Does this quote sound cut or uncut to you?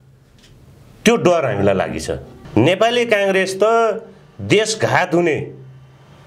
cut